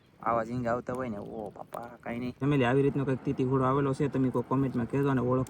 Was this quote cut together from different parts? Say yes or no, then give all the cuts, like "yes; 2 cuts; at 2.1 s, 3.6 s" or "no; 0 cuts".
yes; 1 cut; at 2.4 s